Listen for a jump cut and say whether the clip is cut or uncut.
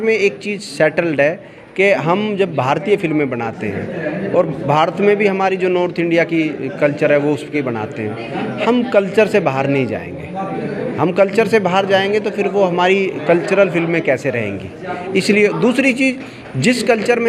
uncut